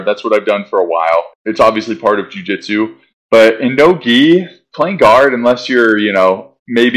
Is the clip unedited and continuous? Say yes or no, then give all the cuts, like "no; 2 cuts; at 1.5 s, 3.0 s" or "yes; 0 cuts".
yes; 0 cuts